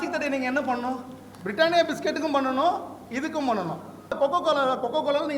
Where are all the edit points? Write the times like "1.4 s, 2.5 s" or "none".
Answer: 4.2 s

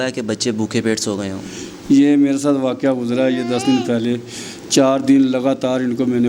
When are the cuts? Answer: none

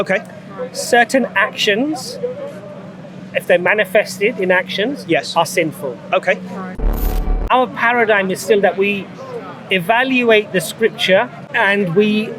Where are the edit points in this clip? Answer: 7.0 s, 11.4 s

